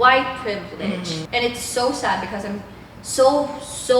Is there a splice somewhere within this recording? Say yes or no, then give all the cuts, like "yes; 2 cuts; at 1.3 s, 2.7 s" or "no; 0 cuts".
yes; 1 cut; at 1.2 s